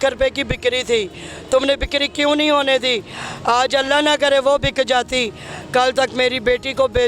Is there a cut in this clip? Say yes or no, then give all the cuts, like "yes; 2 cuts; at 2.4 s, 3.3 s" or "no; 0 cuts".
no; 0 cuts